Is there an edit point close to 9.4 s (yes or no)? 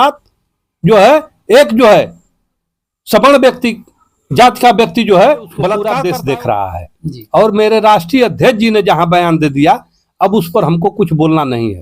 no